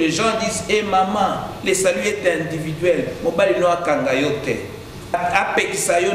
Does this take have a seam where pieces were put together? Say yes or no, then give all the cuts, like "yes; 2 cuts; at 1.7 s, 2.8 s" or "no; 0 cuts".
yes; 1 cut; at 5.1 s